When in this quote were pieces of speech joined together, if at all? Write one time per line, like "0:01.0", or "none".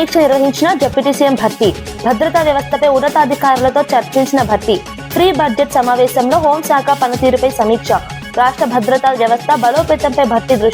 none